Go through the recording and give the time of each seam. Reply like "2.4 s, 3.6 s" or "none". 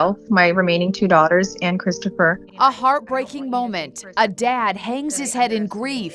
2.4 s